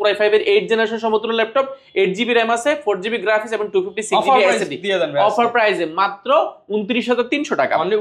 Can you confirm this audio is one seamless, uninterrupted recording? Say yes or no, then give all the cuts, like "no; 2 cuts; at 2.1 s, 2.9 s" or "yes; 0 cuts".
yes; 0 cuts